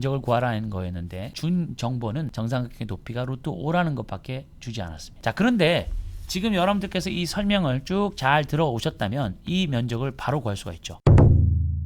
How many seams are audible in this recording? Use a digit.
1